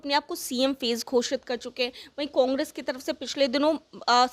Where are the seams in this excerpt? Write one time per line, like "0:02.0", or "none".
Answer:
none